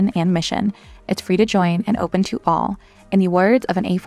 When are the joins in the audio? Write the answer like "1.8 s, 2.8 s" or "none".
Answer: none